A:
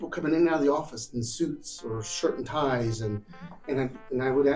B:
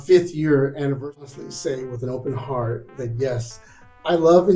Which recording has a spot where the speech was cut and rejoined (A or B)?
B